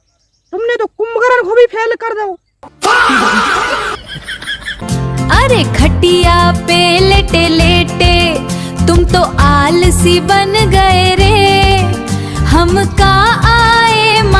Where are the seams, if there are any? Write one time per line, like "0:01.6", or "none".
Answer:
0:04.8